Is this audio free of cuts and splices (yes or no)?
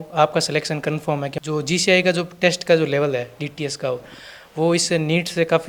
no